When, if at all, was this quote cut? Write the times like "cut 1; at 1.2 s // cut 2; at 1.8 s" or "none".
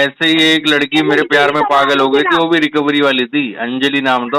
none